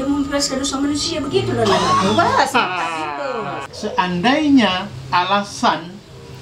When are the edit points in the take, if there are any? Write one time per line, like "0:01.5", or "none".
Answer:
0:03.7